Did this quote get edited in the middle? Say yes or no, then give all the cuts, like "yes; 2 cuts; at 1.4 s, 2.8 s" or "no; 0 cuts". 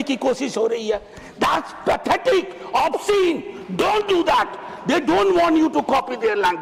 no; 0 cuts